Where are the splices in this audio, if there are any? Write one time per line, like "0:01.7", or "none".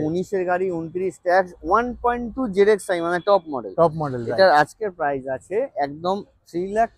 none

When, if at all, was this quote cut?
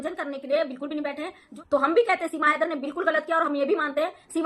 0:01.4

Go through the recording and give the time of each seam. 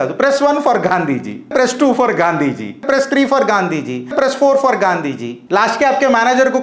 0:01.5
0:02.9
0:04.1
0:05.3

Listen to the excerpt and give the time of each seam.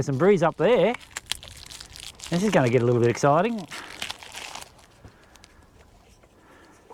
none

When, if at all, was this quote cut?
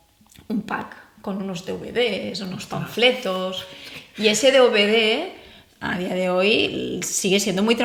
none

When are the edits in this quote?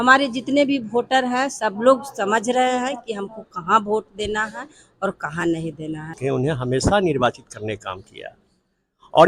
0:06.2

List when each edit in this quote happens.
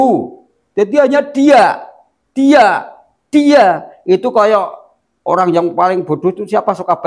none

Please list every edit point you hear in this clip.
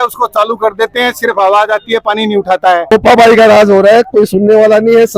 0:02.9

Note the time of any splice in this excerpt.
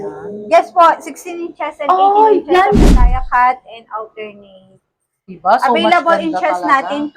0:02.8

